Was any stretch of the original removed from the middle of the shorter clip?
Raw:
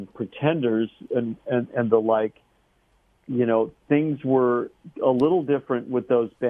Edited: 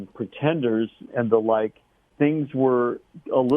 yes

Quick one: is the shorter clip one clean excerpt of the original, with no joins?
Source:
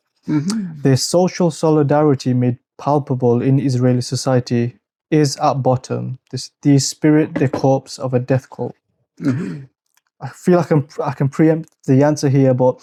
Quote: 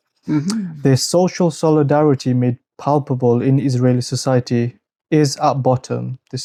yes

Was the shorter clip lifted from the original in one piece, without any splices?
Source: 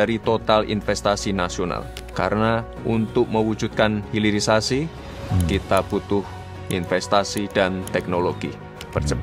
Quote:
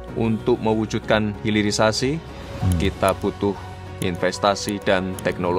yes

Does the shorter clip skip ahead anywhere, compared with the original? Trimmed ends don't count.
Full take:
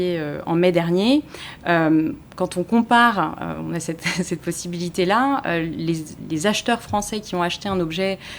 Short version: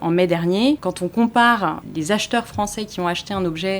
yes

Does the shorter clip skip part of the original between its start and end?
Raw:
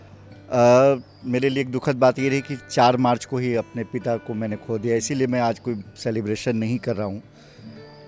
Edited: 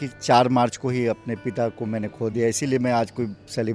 no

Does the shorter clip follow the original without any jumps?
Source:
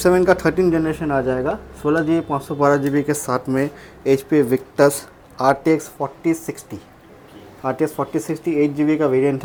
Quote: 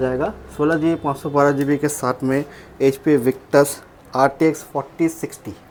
yes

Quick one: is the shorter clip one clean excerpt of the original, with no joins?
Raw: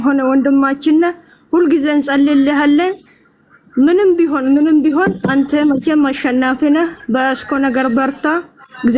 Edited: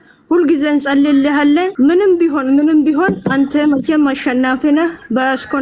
no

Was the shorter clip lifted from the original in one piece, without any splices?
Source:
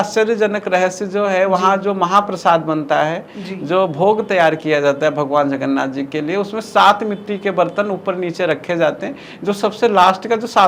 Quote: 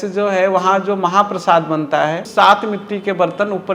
no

